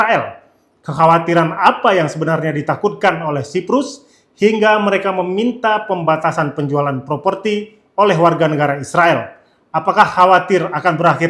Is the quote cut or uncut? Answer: uncut